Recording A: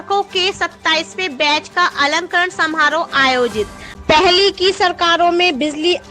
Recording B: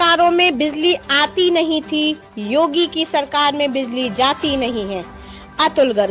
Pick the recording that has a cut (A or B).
A